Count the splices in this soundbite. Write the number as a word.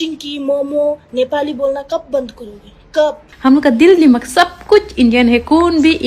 one